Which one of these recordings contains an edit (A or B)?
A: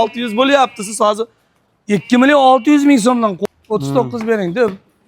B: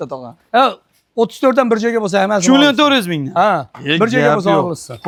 A